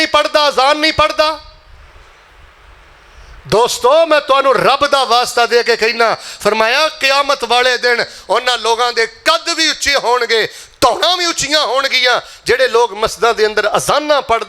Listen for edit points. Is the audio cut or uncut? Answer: uncut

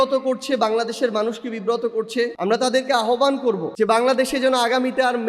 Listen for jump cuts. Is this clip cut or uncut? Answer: cut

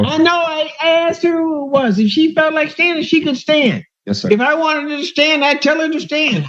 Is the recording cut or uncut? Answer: uncut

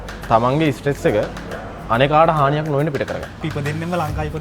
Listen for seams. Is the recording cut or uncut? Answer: cut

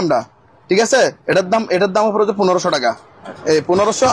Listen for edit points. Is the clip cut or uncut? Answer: uncut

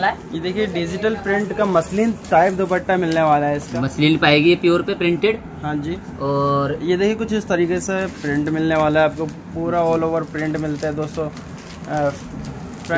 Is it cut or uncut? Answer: cut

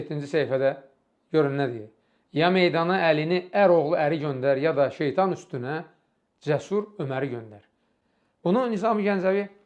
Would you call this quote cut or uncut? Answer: uncut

